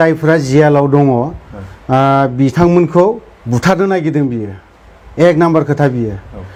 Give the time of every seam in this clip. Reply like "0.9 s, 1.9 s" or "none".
none